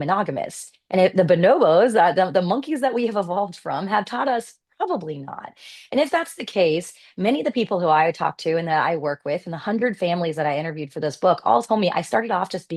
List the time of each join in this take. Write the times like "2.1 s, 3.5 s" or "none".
none